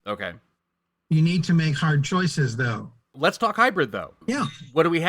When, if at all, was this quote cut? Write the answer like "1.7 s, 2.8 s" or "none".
3.0 s